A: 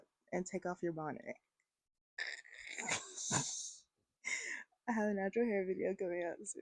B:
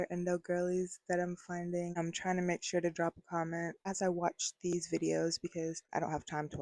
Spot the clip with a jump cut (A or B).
B